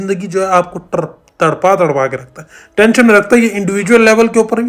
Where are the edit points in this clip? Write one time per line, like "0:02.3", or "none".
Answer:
none